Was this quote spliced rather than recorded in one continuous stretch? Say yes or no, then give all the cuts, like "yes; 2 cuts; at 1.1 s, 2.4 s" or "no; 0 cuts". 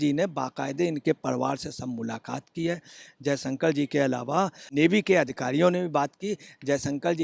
yes; 1 cut; at 4.6 s